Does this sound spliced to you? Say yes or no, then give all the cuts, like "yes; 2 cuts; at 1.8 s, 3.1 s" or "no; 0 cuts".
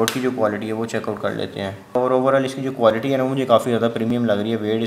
yes; 1 cut; at 2.0 s